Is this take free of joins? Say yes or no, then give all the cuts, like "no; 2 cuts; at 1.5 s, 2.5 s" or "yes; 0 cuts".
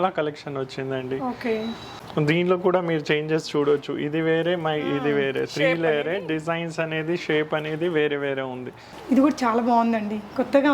yes; 0 cuts